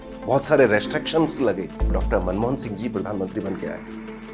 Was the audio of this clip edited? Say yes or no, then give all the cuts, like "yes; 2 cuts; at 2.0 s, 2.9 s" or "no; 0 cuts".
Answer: yes; 1 cut; at 1.9 s